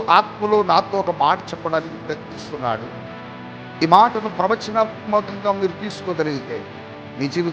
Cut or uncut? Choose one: uncut